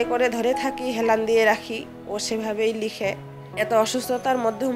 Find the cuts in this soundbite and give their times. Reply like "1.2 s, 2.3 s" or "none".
3.4 s